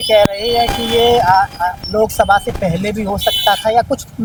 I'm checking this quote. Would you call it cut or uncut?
uncut